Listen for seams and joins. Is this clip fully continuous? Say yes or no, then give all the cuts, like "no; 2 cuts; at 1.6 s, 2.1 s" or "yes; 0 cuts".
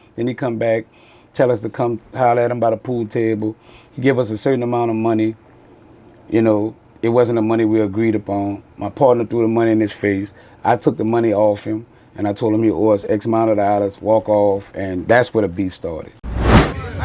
no; 1 cut; at 16.1 s